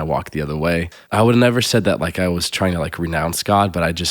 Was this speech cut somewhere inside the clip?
yes; 1 cut; at 1.0 s

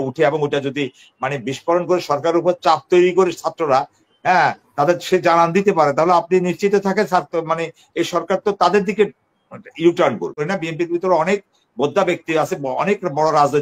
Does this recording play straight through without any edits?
no; 1 cut; at 10.4 s

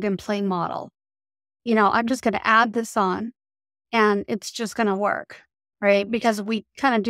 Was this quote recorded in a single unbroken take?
yes; 0 cuts

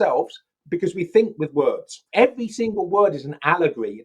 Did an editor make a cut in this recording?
yes; 1 cut; at 2.0 s

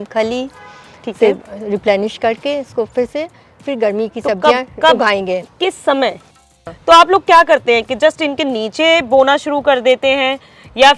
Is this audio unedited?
no; 1 cut; at 6.3 s

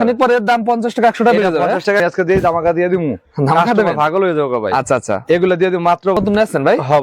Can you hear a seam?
yes; 2 cuts; at 2.0 s, 6.2 s

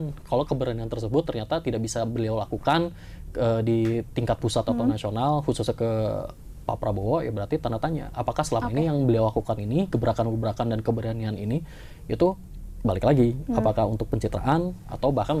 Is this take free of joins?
yes; 0 cuts

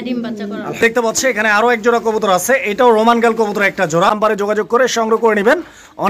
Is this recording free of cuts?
no; 2 cuts; at 0.8 s, 4.6 s

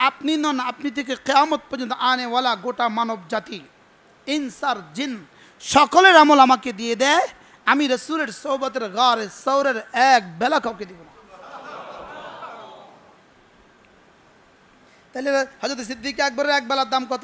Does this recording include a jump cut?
yes; 1 cut; at 4.4 s

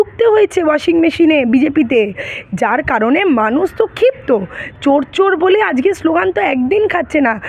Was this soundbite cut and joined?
no; 0 cuts

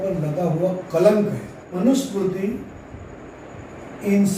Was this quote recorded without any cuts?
no; 1 cut; at 1.8 s

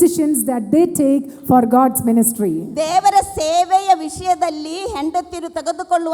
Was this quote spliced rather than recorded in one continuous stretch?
no; 0 cuts

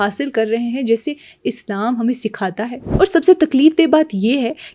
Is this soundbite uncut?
no; 1 cut; at 2.8 s

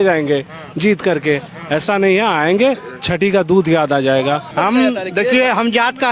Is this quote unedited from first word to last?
no; 1 cut; at 4.5 s

